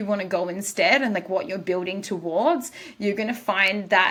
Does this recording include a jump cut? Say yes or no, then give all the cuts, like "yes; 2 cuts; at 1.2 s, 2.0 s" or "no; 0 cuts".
no; 0 cuts